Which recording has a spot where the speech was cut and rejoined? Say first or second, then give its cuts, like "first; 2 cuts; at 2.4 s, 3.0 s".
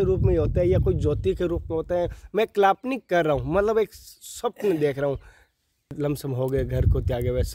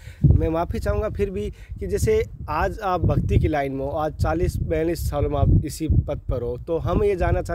first; 1 cut; at 5.9 s